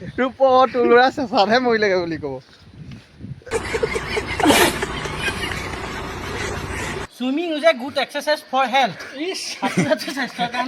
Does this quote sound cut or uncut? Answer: cut